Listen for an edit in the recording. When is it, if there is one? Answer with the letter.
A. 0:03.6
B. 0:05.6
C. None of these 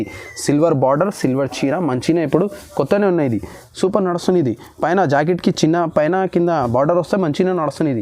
A